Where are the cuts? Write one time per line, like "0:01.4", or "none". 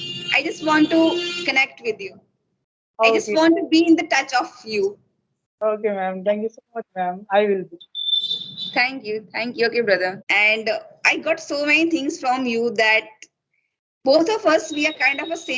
0:10.2